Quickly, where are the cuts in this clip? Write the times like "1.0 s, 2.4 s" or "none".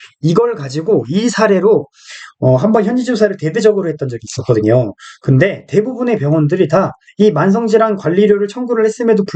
none